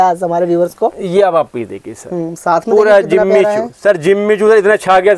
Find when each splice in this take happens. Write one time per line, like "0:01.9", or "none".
none